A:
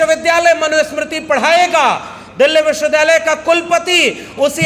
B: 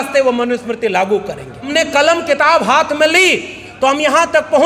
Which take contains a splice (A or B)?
B